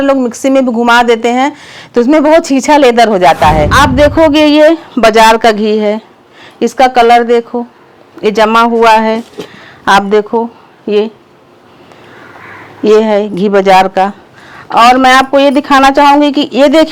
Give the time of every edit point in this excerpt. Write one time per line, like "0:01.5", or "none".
0:03.7